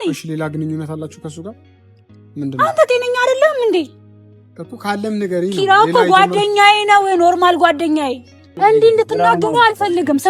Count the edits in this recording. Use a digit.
1